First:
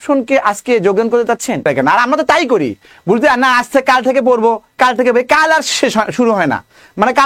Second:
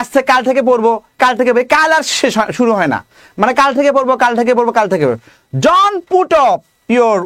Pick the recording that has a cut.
first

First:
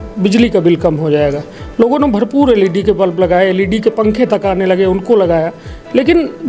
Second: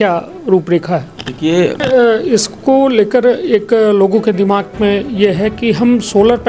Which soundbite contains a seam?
second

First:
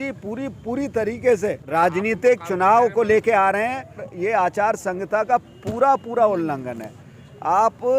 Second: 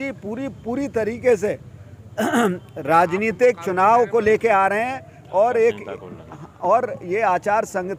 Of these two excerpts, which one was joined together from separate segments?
first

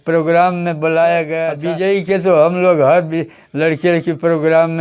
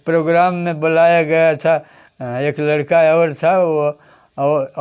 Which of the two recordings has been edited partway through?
first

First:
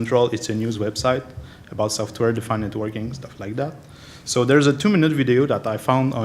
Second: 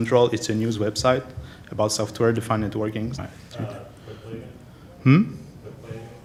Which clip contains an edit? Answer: first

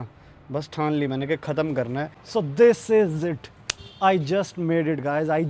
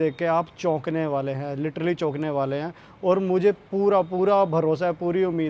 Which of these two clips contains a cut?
first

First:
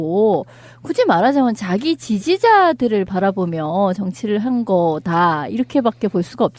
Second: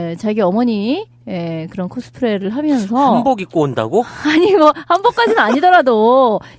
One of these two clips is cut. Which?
first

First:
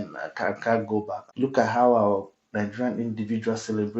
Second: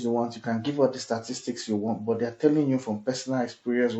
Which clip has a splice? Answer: first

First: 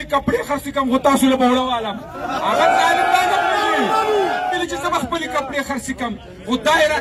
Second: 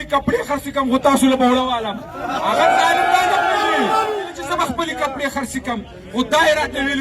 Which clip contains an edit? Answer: second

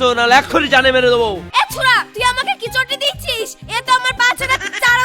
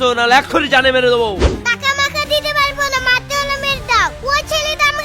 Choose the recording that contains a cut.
first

